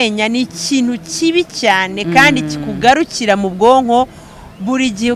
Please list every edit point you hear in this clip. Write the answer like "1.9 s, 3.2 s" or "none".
none